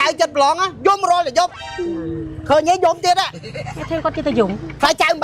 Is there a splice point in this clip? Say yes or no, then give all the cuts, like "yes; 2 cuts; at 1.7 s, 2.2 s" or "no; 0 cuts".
no; 0 cuts